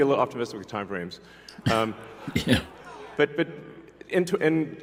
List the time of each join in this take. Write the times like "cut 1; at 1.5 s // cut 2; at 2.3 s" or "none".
none